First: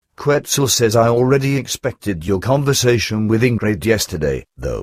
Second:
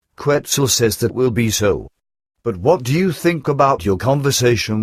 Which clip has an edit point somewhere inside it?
first; 1 cut; at 0.9 s

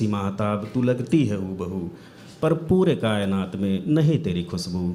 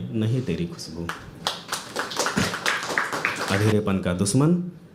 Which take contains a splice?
second; 1 cut; at 3.4 s

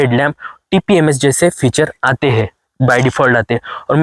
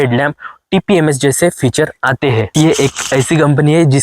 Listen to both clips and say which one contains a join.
second; 1 cut; at 2.5 s

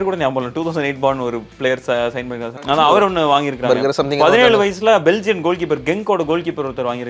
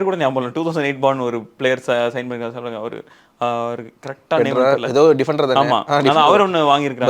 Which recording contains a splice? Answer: first; 1 cut; at 2.7 s

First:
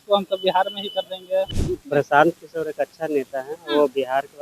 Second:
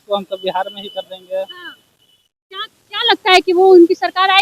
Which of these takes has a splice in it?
first; 1 cut; at 1.6 s

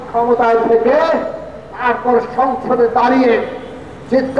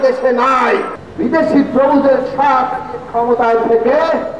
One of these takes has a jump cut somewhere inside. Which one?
second; 1 cut; at 1.0 s

